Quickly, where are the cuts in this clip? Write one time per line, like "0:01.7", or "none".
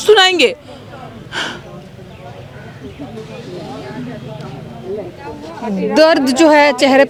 none